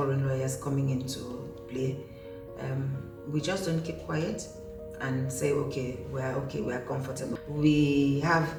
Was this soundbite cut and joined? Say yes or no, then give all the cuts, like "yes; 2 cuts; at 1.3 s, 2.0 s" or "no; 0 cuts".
no; 0 cuts